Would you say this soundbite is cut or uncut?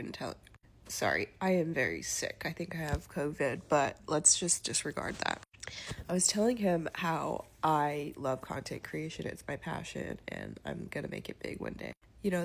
cut